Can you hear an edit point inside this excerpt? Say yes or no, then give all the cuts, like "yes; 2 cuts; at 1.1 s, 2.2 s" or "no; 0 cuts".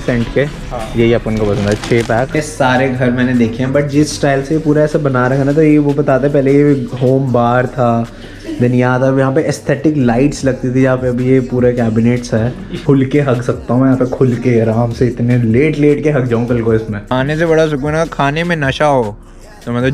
yes; 3 cuts; at 2.3 s, 12.7 s, 17.0 s